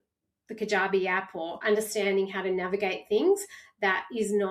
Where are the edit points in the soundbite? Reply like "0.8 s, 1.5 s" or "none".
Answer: 1.5 s